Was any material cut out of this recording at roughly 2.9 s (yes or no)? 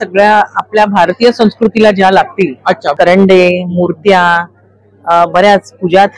yes